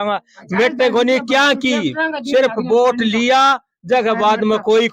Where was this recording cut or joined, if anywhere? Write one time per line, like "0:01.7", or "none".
none